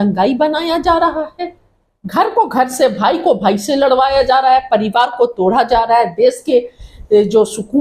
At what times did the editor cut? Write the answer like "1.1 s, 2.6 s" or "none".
none